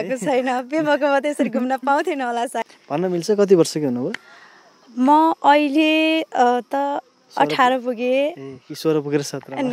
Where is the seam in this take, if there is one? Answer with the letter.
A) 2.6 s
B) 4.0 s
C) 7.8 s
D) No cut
A